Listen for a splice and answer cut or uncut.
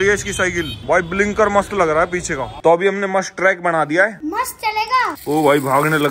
cut